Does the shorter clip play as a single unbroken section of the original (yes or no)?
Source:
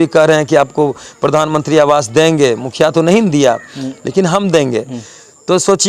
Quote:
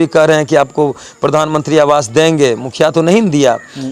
yes